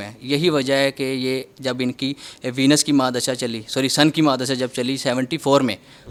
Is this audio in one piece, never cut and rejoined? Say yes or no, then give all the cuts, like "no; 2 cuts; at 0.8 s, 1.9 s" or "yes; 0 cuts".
yes; 0 cuts